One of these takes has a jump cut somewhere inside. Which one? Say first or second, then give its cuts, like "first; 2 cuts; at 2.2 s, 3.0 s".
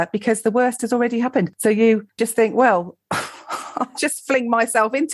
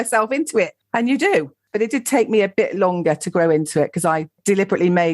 second; 1 cut; at 1.7 s